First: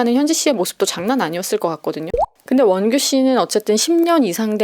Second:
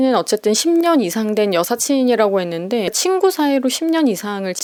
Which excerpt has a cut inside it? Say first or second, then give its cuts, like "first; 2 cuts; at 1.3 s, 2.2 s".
first; 1 cut; at 2.1 s